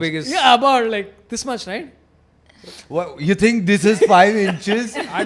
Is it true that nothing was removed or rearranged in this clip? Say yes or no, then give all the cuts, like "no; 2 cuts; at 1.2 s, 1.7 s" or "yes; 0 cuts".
yes; 0 cuts